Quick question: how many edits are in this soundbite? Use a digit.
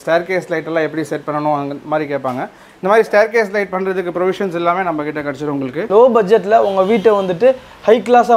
1